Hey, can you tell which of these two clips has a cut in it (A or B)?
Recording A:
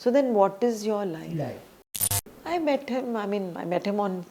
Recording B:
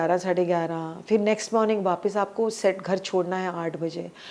A